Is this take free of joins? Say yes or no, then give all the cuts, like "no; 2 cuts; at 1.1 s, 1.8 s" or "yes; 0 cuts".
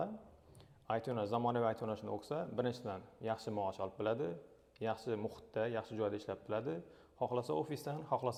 yes; 0 cuts